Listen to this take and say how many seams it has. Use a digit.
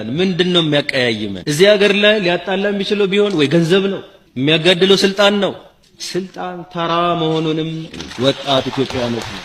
1